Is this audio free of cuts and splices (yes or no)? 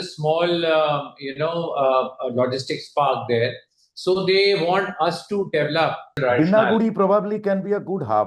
no